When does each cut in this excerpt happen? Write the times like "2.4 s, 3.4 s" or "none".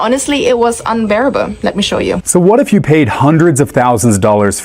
2.2 s